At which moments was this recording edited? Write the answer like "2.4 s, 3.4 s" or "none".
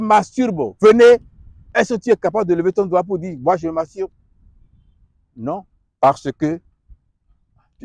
none